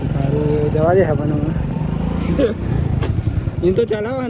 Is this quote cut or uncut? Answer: uncut